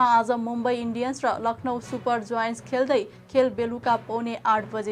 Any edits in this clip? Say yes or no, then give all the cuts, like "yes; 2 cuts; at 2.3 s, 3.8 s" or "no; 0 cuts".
no; 0 cuts